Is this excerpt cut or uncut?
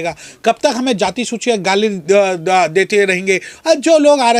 uncut